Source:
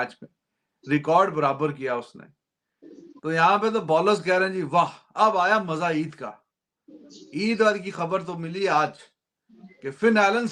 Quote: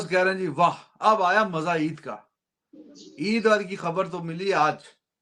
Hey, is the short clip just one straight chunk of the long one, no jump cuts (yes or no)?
yes